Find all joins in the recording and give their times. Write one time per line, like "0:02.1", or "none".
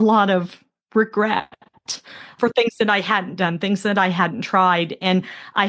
0:02.3